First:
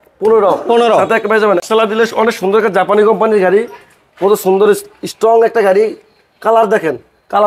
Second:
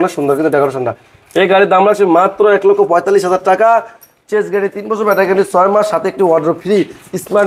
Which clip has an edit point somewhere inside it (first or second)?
first